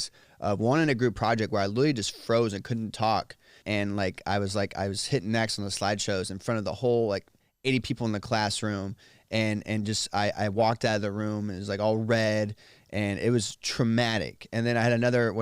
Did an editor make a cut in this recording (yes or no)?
yes